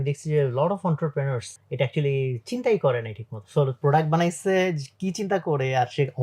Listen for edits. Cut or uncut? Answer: cut